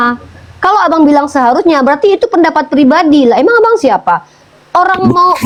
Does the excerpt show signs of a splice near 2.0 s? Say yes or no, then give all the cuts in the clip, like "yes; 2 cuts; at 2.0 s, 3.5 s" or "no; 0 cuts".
no; 0 cuts